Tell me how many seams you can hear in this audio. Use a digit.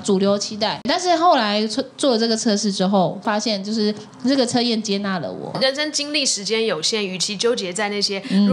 3